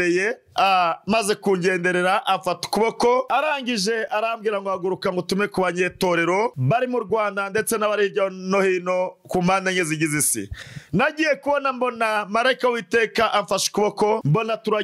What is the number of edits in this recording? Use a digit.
0